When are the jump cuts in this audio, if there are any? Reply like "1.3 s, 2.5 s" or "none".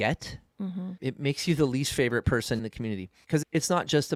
none